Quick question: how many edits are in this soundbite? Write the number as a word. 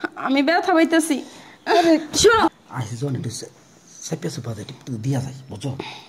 one